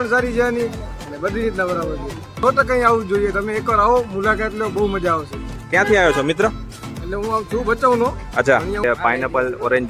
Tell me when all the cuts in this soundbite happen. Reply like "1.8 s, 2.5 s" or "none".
2.4 s, 8.8 s